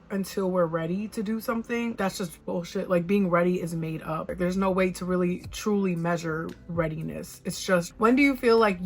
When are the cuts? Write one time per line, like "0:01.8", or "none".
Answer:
0:01.9
0:04.2
0:07.9